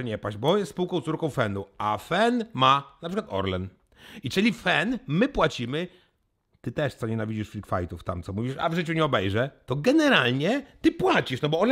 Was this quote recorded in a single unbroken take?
yes; 0 cuts

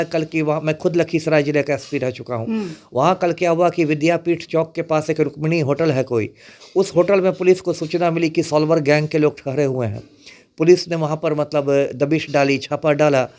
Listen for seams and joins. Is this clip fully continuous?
yes; 0 cuts

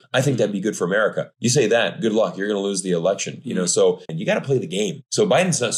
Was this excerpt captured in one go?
no; 1 cut; at 4.1 s

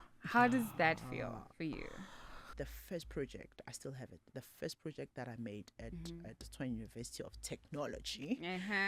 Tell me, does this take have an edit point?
yes; 1 cut; at 2.5 s

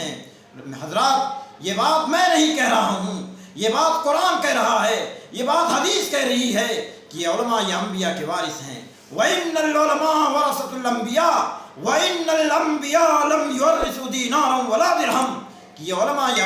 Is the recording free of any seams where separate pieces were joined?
yes; 0 cuts

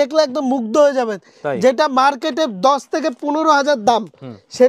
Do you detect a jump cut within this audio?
no; 0 cuts

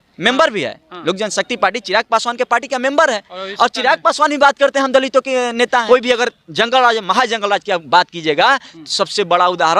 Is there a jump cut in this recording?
yes; 1 cut; at 5.8 s

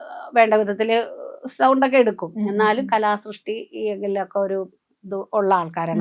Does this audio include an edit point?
no; 0 cuts

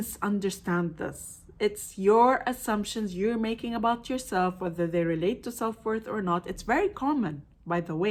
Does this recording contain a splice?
no; 0 cuts

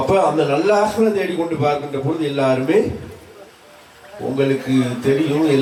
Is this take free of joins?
yes; 0 cuts

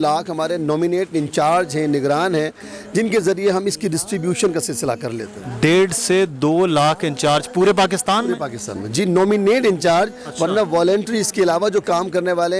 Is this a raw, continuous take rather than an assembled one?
yes; 0 cuts

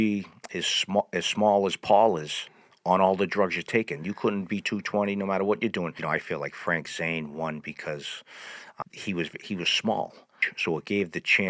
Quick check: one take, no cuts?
no; 3 cuts; at 6.0 s, 8.8 s, 10.5 s

